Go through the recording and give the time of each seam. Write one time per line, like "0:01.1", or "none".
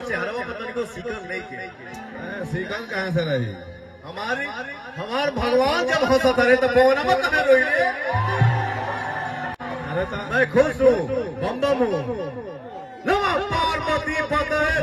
none